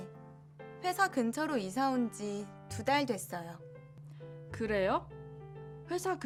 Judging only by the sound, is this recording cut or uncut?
uncut